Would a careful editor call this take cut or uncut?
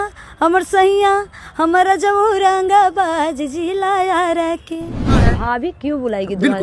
cut